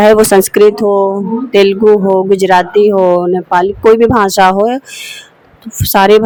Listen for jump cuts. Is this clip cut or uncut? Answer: uncut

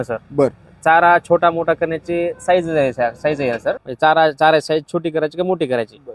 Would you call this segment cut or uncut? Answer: cut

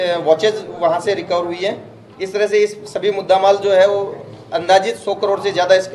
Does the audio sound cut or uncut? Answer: uncut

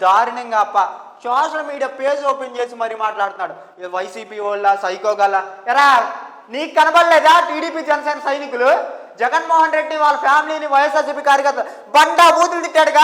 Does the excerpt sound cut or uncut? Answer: uncut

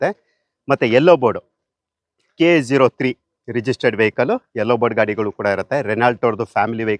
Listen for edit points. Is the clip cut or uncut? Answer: uncut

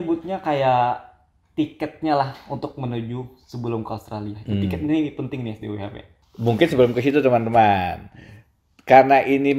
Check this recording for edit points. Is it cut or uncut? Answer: uncut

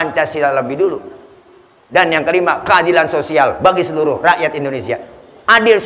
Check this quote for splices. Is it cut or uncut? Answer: cut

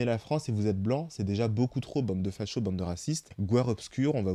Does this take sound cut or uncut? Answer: uncut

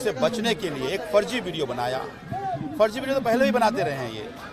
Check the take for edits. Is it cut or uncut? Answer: uncut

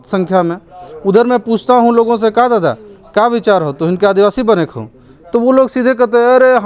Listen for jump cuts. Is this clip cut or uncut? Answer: uncut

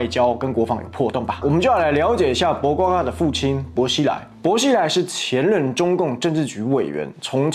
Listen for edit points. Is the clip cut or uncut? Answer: cut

